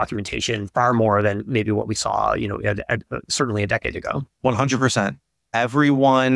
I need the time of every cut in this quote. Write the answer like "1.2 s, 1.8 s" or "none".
4.3 s